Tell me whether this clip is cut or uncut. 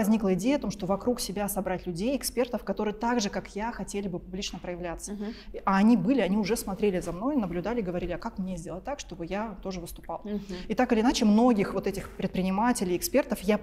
uncut